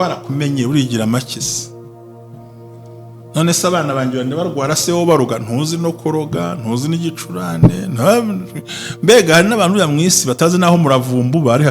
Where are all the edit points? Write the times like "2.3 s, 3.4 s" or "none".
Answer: 1.5 s, 3.3 s